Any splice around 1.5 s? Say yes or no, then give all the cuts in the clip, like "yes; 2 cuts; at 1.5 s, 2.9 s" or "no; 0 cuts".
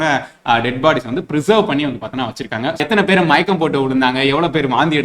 no; 1 cut; at 2.8 s